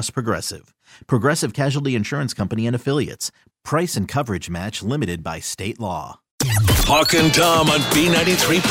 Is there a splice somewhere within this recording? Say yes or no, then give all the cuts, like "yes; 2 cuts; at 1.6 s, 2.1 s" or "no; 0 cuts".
yes; 1 cut; at 6.3 s